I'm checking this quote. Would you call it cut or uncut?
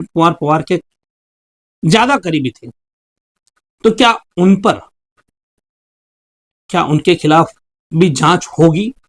uncut